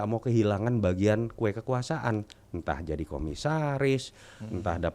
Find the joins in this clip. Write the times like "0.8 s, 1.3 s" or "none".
none